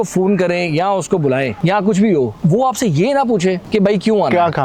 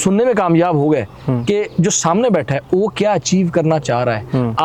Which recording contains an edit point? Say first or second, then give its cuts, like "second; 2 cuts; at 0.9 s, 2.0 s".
first; 3 cuts; at 1.5 s, 2.3 s, 3.6 s